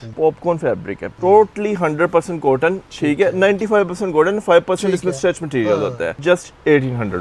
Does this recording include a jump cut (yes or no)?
yes